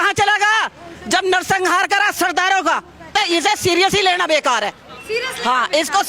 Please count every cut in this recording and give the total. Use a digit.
1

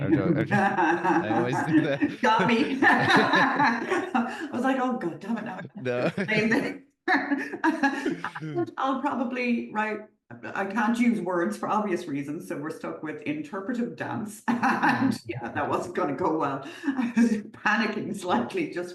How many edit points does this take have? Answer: 0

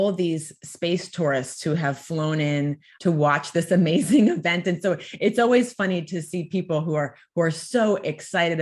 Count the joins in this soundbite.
1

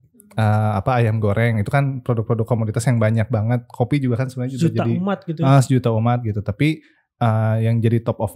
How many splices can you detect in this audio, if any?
0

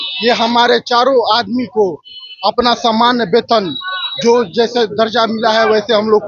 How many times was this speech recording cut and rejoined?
0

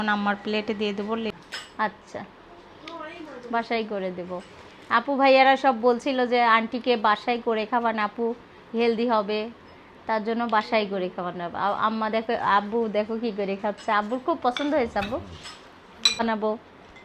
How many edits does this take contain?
2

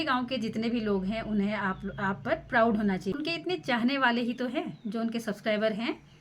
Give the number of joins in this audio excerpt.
1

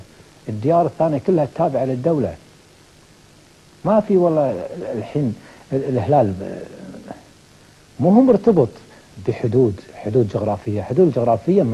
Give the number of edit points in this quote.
0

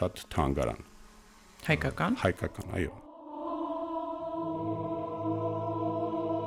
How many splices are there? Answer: 0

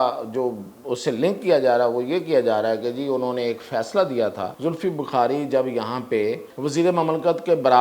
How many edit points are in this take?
2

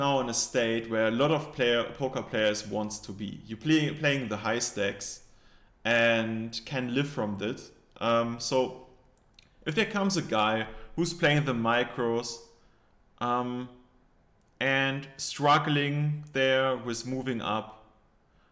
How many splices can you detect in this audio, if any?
0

